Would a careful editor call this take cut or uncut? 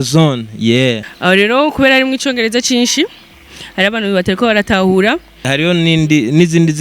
cut